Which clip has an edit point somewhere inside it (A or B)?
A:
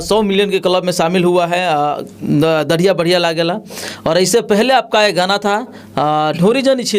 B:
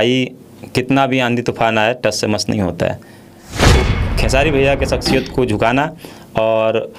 B